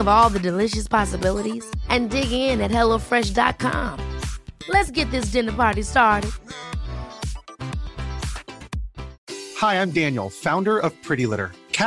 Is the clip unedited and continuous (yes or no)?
no